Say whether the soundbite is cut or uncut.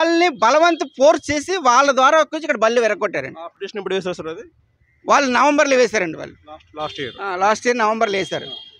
uncut